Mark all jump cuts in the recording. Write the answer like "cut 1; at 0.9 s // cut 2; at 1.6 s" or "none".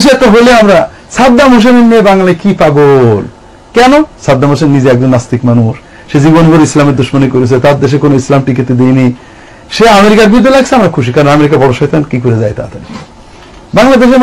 none